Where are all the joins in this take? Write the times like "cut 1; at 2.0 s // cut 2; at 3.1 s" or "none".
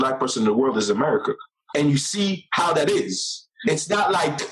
cut 1; at 1.5 s // cut 2; at 3.6 s